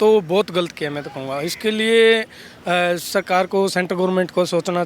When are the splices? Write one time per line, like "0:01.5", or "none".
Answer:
none